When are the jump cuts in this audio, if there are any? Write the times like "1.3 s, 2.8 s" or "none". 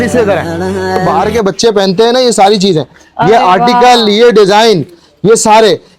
1.0 s